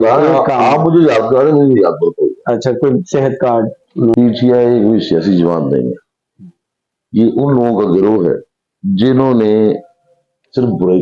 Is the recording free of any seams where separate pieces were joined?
no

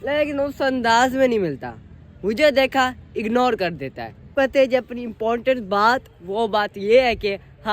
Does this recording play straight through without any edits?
no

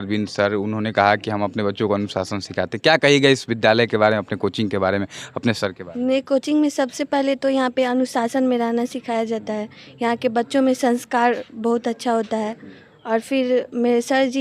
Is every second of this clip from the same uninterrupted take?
yes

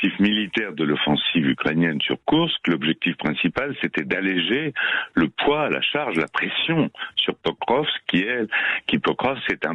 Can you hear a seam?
no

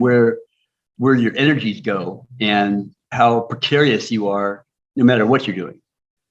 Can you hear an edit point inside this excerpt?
no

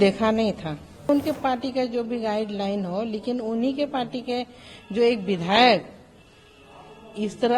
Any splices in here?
yes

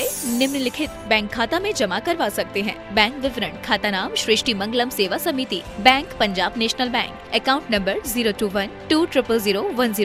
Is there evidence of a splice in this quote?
no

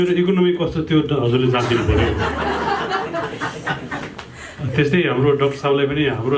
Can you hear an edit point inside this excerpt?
no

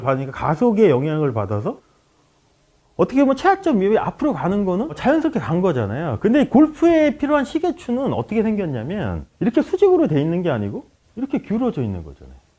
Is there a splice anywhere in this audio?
no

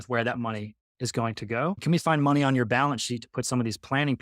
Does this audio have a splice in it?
yes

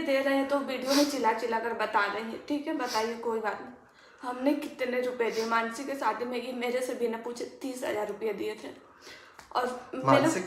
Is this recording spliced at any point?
no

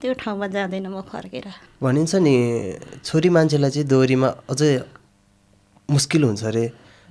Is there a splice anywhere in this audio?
yes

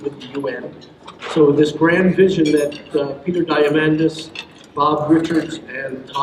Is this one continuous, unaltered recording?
yes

